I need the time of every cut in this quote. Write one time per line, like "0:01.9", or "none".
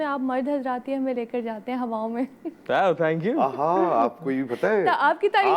none